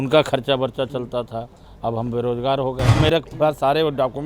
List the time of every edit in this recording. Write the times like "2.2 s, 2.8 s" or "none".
2.9 s